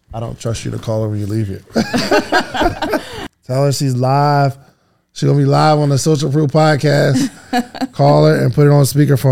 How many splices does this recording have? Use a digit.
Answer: 1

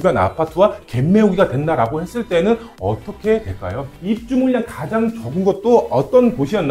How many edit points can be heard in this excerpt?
1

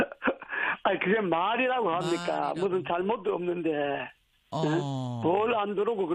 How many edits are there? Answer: 0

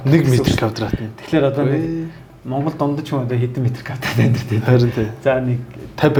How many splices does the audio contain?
0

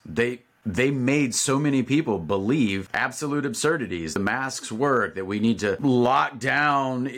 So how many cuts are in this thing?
3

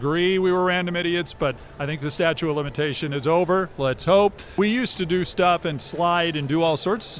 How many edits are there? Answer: 1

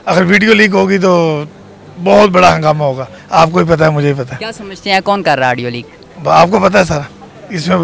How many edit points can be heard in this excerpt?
1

